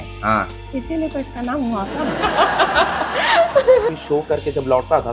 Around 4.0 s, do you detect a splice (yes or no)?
yes